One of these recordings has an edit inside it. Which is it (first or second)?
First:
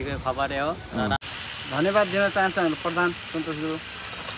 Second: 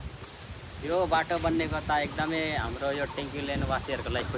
first